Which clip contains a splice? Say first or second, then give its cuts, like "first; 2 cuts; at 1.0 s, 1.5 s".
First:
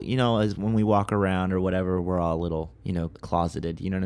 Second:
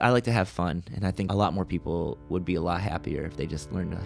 second; 1 cut; at 1.3 s